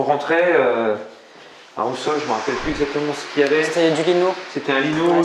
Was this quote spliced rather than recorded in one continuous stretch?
no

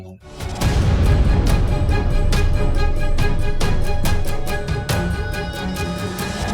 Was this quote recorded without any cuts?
yes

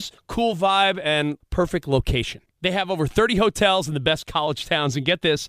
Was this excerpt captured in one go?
yes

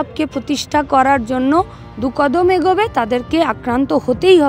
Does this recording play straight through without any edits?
yes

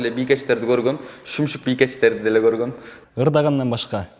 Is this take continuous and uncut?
no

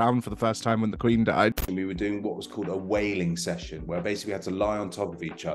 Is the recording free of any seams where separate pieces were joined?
no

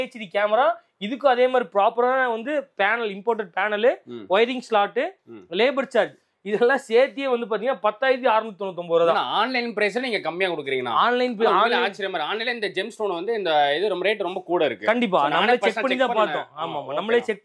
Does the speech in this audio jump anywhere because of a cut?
no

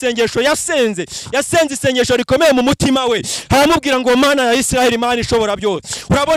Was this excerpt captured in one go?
yes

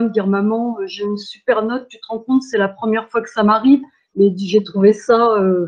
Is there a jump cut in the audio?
no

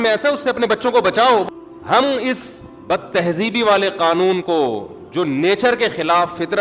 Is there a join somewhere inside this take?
yes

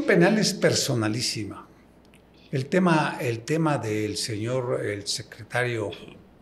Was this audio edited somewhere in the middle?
no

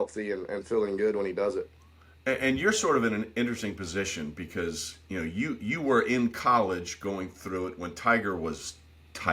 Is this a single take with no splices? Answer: yes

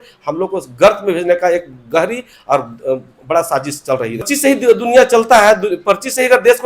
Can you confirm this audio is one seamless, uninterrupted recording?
no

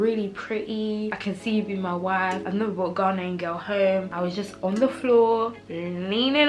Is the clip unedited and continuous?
no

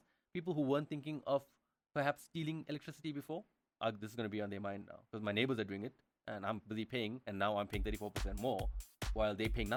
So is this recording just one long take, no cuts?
yes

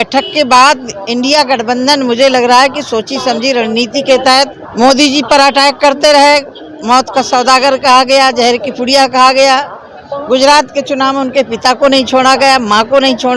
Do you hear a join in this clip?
yes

